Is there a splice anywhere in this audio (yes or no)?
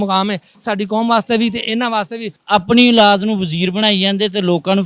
yes